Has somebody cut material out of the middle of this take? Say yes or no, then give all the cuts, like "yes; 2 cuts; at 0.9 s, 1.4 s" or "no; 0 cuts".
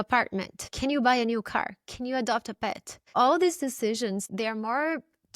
yes; 2 cuts; at 3.1 s, 4.3 s